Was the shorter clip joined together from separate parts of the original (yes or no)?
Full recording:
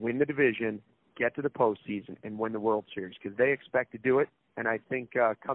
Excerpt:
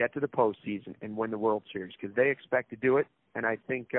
no